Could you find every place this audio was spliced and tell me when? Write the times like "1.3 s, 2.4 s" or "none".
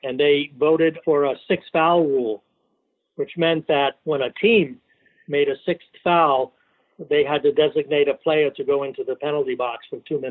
1.0 s, 4.0 s